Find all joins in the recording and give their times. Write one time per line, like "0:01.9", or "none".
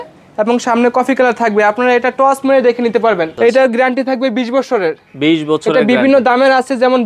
0:03.3